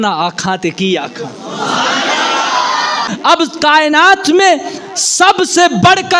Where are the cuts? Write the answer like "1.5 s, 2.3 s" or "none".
3.1 s

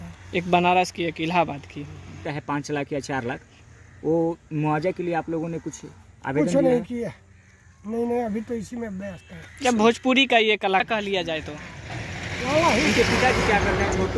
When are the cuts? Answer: 2.3 s, 10.8 s

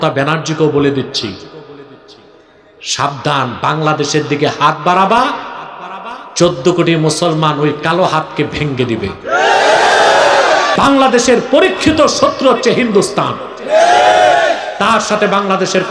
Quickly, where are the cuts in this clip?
10.7 s

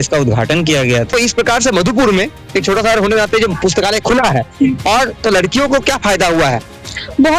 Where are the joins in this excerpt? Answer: 1.1 s

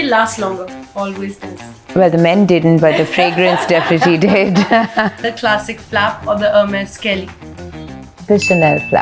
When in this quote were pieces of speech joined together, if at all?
5.2 s

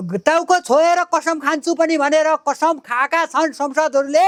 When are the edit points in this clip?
none

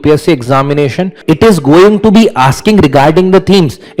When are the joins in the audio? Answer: 1.2 s

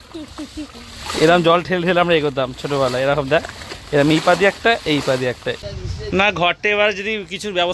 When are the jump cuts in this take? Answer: 5.6 s

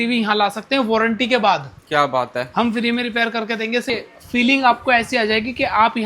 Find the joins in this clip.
3.9 s

